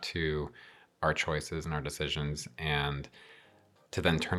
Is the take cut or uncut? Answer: uncut